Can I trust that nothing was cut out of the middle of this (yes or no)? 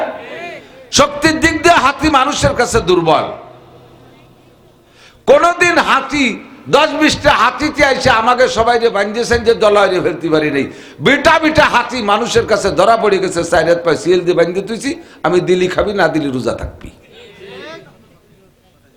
yes